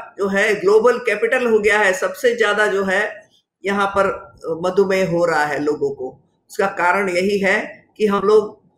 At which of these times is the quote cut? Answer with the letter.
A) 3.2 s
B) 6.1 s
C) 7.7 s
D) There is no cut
D